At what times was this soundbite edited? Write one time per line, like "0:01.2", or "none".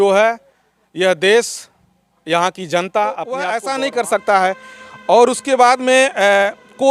0:03.5